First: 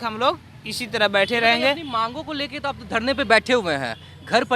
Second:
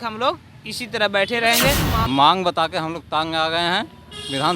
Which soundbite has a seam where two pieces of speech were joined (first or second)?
second